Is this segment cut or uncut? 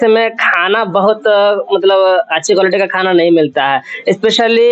uncut